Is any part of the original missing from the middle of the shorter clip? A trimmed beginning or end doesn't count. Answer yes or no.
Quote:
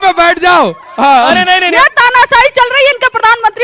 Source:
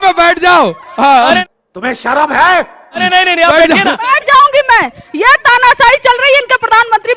yes